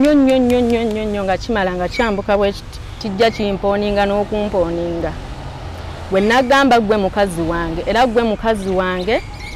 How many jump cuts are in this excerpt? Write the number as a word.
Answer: one